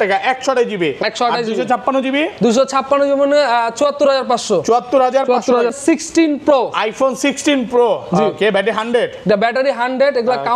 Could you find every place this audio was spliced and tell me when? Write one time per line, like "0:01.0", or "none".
0:05.8